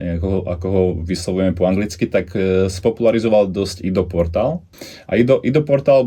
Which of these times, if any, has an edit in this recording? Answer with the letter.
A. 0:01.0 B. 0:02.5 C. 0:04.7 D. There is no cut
C